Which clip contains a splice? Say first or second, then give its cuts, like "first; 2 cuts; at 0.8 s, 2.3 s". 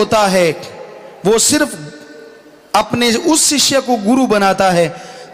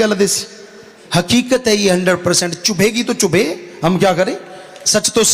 second; 1 cut; at 1.0 s